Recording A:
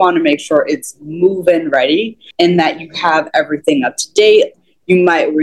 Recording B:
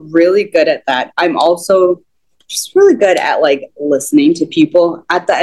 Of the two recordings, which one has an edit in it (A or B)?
A